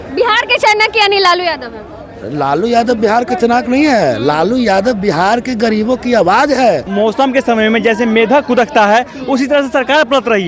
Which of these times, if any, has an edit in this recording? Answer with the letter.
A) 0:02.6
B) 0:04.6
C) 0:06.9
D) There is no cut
C